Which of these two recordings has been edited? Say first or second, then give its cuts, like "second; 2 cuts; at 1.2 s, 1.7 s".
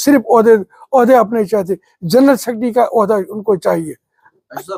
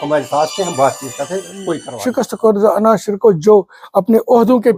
second; 1 cut; at 2.0 s